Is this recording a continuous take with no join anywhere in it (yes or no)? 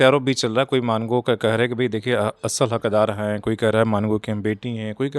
yes